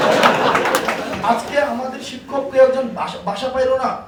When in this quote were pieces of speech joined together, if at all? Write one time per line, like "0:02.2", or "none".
none